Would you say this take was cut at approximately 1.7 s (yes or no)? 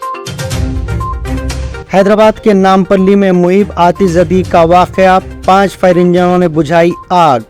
yes